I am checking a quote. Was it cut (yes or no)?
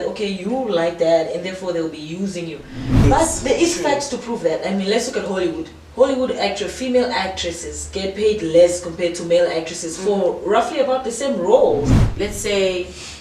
yes